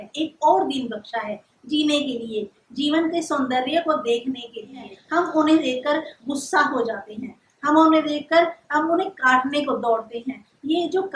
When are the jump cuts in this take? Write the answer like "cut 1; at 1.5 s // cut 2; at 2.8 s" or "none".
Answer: cut 1; at 4.9 s